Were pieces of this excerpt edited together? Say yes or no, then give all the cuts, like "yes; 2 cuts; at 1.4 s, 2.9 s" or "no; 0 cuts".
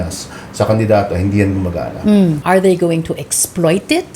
yes; 1 cut; at 2.4 s